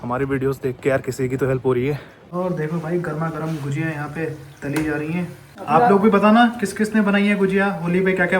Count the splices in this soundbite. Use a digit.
2